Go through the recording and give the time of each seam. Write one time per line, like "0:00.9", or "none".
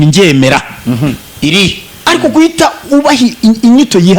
0:01.9